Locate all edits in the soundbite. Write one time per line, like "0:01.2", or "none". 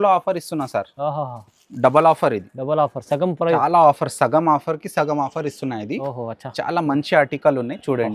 0:03.6